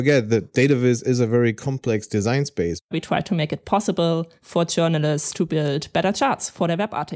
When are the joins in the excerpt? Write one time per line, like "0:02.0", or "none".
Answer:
0:02.9
0:04.4